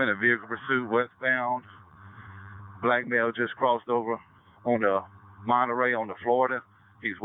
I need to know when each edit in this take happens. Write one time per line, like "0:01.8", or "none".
none